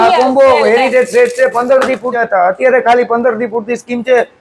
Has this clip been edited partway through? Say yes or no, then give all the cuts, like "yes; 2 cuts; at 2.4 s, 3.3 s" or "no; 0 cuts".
yes; 1 cut; at 2.4 s